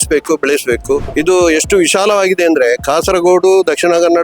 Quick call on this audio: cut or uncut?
cut